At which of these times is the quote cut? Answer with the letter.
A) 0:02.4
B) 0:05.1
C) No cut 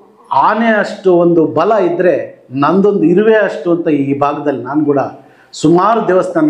C